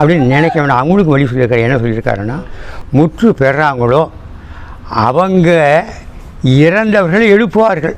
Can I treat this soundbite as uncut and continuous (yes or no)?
no